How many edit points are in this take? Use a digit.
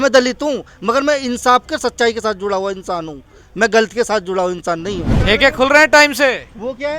1